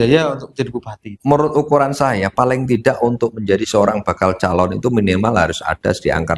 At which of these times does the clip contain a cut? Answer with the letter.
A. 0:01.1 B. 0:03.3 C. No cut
A